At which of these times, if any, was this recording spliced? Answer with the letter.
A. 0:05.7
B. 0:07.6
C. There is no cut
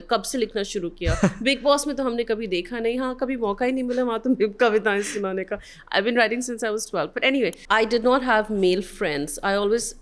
B